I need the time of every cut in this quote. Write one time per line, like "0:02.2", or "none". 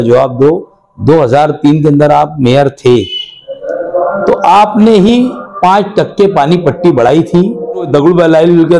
0:07.9